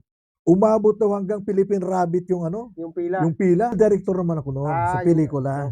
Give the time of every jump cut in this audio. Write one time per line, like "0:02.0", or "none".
0:03.8